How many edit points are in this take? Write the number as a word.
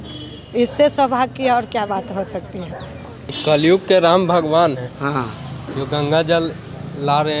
one